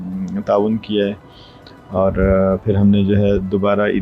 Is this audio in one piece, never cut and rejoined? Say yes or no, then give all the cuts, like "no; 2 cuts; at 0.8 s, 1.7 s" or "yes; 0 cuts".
yes; 0 cuts